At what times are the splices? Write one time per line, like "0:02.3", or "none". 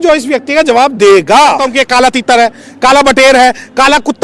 0:01.6